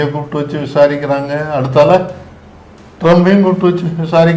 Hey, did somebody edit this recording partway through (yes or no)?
no